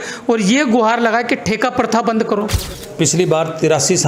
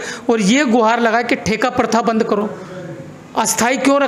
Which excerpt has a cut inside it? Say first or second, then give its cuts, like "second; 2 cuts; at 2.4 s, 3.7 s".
first; 1 cut; at 2.8 s